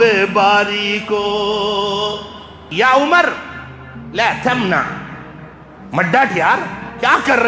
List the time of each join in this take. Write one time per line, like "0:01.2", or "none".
0:02.6